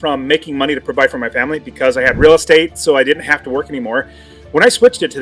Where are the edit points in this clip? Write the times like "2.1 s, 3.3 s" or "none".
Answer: none